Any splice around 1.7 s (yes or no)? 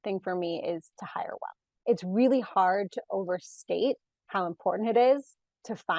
yes